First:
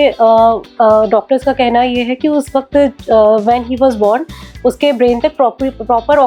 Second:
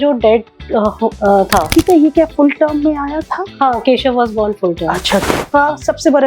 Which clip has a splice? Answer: second; 2 cuts; at 1.7 s, 5.3 s

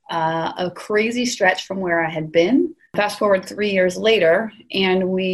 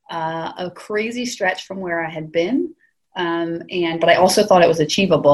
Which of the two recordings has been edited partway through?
first; 1 cut; at 2.9 s

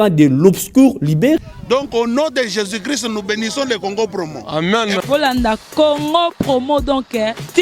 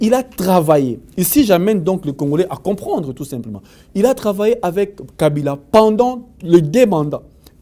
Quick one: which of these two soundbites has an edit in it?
first; 1 cut; at 1.4 s

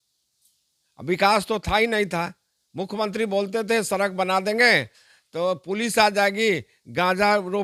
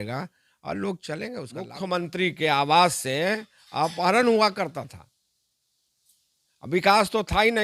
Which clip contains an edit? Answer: second; 1 cut; at 1.7 s

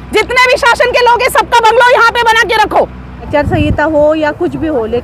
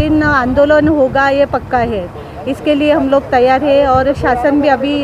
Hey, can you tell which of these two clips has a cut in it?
first; 1 cut; at 3.2 s

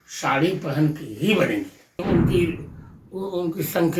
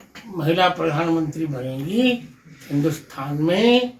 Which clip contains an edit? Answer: first; 1 cut; at 2.1 s

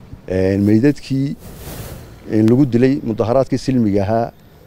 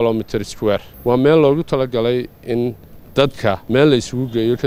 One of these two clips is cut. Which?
second; 2 cuts; at 0.9 s, 3.6 s

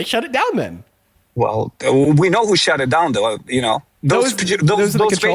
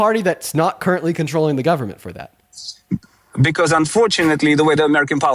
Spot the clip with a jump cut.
second; 1 cut; at 3.2 s

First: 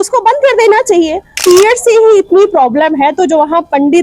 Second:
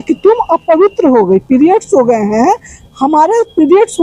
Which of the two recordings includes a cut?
first; 1 cut; at 1.4 s

